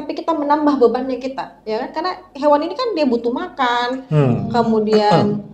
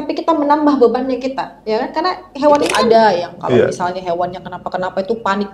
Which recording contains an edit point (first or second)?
second